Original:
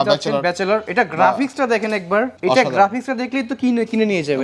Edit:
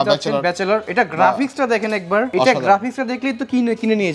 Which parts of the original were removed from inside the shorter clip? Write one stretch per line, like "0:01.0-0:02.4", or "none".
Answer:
0:02.3-0:02.4